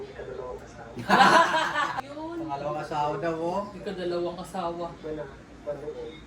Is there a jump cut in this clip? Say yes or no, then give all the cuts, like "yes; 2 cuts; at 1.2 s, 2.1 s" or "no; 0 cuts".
yes; 1 cut; at 2.0 s